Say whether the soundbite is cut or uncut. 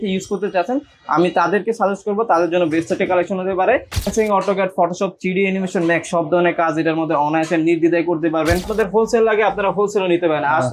cut